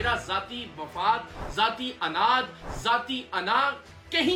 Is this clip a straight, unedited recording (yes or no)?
yes